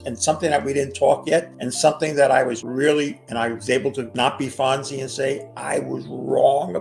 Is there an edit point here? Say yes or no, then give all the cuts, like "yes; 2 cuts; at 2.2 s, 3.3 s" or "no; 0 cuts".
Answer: yes; 4 cuts; at 1.6 s, 2.6 s, 4.1 s, 5.5 s